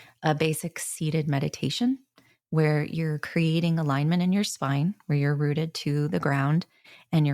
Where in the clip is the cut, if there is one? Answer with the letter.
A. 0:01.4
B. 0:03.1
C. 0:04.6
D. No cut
D